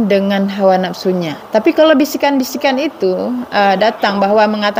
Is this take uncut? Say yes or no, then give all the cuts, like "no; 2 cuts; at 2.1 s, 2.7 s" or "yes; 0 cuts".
yes; 0 cuts